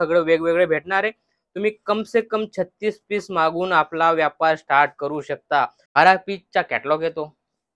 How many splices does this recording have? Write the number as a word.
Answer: one